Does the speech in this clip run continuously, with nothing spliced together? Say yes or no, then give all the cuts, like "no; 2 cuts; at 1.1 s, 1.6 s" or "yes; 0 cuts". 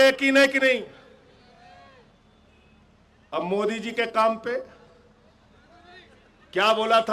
yes; 0 cuts